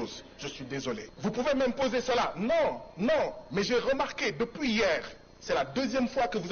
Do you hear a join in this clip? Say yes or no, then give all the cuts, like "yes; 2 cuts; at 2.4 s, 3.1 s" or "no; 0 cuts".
yes; 1 cut; at 1.1 s